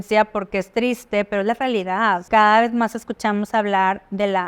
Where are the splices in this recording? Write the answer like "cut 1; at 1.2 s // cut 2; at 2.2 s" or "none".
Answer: cut 1; at 2.2 s